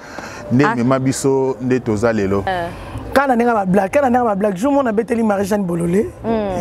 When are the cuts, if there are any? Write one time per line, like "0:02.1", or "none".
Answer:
0:02.5